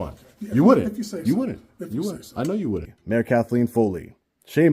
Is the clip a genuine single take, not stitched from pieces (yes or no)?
no